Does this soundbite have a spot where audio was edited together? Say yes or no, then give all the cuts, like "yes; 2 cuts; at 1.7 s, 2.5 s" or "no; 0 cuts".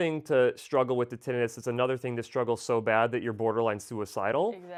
no; 0 cuts